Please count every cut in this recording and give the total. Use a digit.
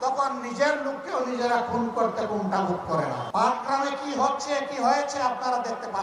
1